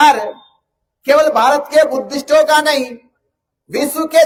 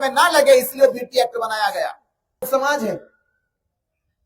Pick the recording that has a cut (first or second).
second